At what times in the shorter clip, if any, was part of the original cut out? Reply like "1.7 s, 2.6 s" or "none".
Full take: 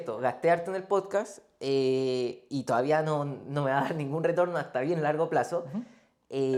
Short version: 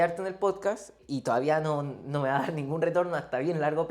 1.0 s

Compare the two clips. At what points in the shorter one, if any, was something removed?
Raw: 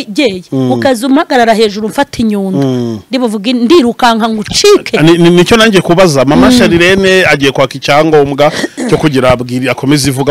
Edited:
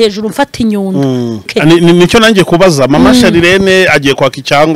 1.5 s

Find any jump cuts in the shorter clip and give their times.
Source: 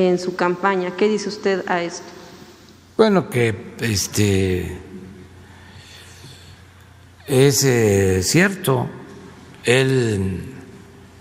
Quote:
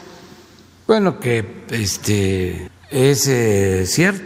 2.7 s

